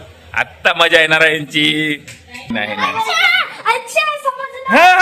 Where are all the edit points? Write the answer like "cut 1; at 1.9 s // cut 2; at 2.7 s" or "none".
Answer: cut 1; at 2.5 s